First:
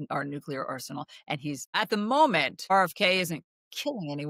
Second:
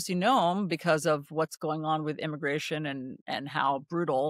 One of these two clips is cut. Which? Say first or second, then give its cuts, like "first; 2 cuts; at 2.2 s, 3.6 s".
first; 2 cuts; at 1.8 s, 2.6 s